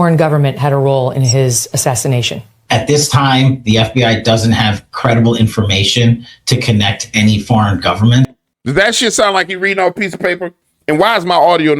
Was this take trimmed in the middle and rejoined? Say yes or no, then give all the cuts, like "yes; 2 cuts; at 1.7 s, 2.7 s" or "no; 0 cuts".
yes; 1 cut; at 8.5 s